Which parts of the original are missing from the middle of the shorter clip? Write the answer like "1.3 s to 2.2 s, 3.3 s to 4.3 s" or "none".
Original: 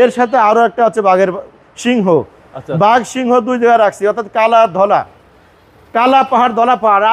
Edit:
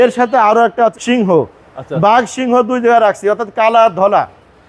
0.9 s to 1.7 s

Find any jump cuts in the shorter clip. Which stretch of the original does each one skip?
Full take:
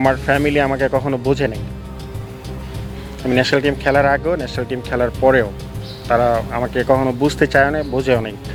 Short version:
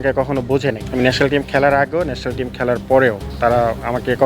1.6 s to 3.2 s, 5.6 s to 5.9 s

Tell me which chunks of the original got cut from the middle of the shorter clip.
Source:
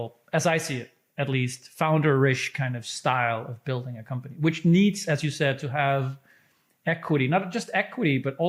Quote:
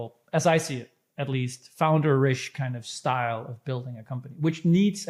none

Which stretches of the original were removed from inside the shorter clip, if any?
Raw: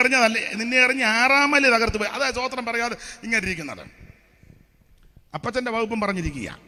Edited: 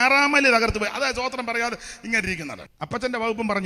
3.8 s to 5.2 s

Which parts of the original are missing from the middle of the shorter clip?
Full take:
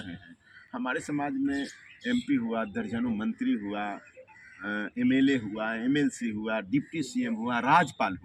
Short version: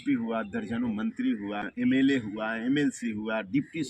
3.9 s to 4.9 s

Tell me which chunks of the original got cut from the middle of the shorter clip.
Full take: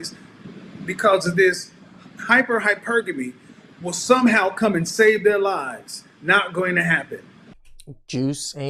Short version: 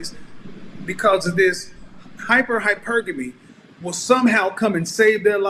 none

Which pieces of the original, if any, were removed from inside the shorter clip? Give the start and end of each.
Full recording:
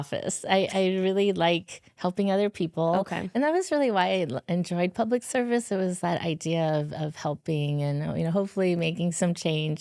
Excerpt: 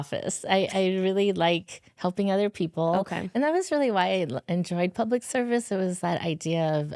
none

